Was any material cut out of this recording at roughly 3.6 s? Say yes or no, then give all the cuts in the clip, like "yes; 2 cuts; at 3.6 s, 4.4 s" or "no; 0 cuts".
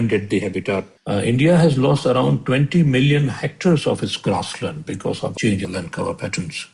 no; 2 cuts; at 0.9 s, 5.3 s